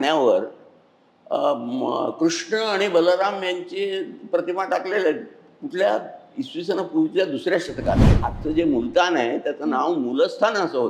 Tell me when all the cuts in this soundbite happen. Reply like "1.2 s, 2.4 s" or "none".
8.1 s